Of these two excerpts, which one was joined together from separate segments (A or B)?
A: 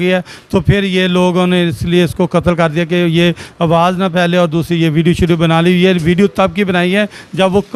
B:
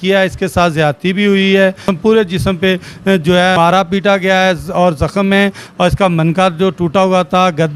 B